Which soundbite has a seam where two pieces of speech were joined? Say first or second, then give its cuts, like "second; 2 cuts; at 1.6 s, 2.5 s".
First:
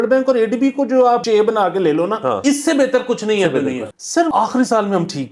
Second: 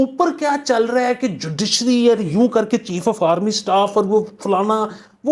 first; 3 cuts; at 1.2 s, 2.4 s, 4.0 s